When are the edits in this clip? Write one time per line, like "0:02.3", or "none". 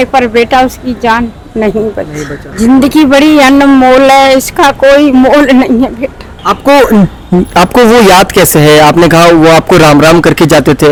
none